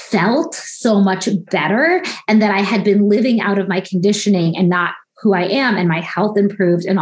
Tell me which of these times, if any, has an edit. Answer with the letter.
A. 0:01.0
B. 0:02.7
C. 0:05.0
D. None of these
D